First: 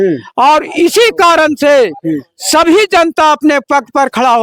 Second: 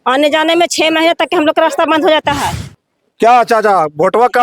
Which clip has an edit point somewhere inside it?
second; 1 cut; at 2.7 s

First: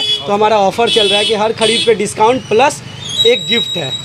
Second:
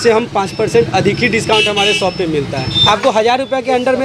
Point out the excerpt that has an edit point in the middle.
second; 1 cut; at 2.7 s

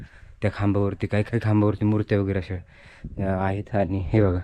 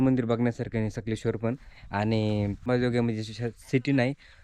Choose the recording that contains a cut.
second; 1 cut; at 2.7 s

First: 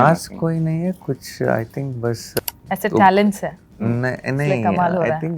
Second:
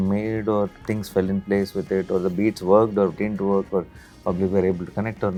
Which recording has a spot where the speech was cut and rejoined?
first; 1 cut; at 2.4 s

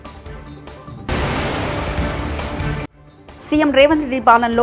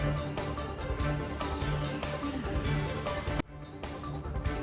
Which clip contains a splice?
first; 2 cuts; at 1.0 s, 3.0 s

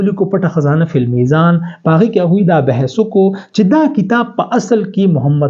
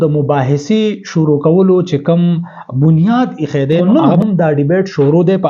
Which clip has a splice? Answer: second; 1 cut; at 3.8 s

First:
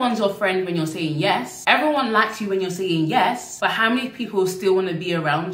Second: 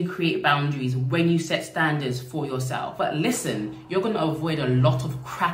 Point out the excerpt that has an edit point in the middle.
second; 1 cut; at 2.9 s

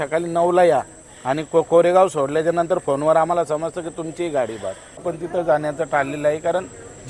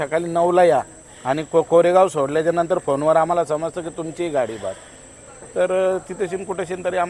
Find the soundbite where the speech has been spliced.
first; 1 cut; at 5.1 s

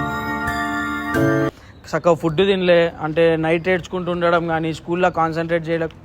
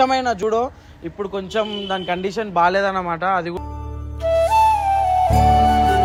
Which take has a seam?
first; 1 cut; at 1.5 s

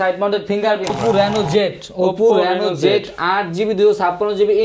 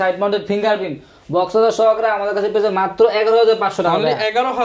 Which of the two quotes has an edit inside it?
first; 1 cut; at 1.0 s

